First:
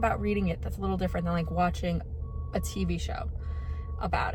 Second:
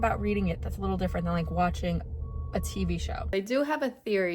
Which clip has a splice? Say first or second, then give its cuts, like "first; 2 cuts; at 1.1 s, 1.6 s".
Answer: second; 1 cut; at 3.3 s